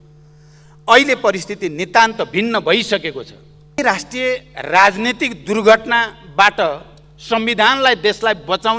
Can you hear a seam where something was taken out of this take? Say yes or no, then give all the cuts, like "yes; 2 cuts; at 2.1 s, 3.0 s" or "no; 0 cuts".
yes; 1 cut; at 3.8 s